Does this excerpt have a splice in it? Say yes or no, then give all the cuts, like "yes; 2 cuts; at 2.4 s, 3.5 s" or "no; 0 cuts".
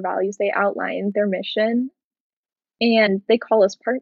no; 0 cuts